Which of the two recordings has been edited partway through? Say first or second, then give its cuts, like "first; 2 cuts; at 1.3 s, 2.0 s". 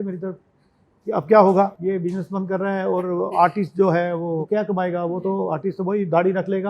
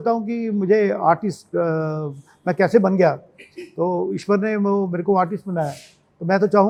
first; 2 cuts; at 1.8 s, 4.4 s